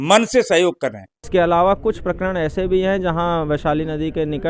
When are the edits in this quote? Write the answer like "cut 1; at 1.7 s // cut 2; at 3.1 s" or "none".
cut 1; at 1.1 s